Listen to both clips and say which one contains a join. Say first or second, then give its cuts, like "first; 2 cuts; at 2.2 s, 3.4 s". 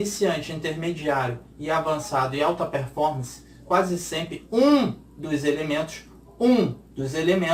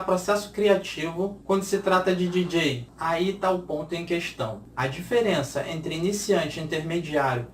second; 3 cuts; at 1.4 s, 2.9 s, 4.6 s